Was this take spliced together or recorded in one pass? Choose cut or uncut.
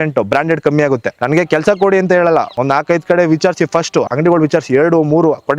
cut